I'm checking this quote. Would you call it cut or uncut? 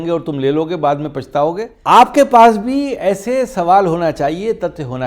cut